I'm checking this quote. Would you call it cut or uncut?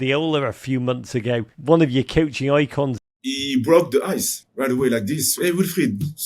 cut